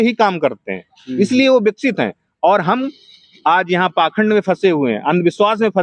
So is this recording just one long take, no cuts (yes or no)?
yes